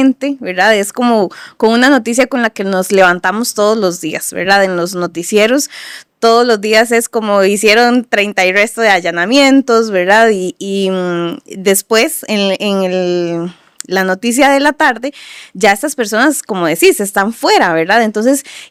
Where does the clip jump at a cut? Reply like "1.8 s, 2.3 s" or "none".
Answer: none